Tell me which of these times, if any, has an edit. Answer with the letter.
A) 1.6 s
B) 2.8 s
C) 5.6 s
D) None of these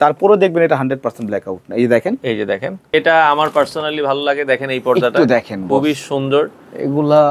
B